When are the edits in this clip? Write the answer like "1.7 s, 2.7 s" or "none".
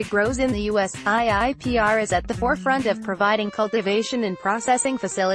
none